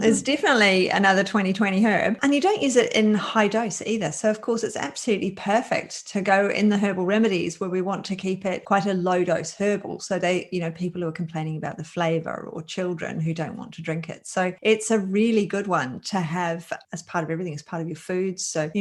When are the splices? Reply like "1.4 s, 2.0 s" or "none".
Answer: none